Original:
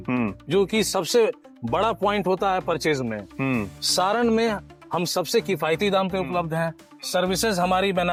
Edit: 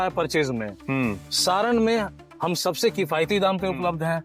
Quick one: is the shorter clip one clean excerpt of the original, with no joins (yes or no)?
yes